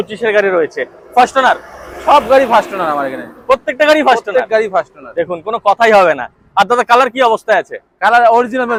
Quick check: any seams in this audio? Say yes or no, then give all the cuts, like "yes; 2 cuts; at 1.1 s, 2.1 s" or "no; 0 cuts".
no; 0 cuts